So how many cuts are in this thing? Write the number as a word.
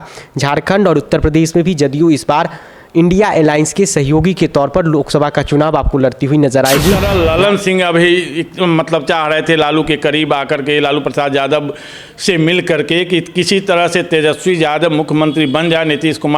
one